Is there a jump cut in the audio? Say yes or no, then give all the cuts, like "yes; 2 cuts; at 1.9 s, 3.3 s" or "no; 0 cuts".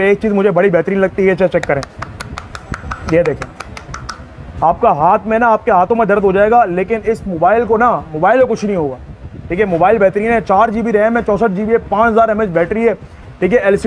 no; 0 cuts